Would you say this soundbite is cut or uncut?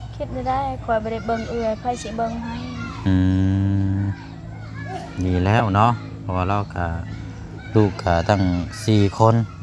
uncut